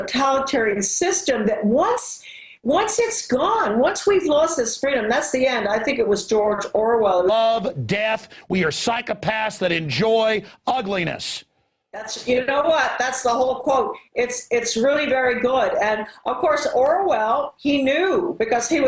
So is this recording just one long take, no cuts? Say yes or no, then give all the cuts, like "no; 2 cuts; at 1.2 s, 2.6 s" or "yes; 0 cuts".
yes; 0 cuts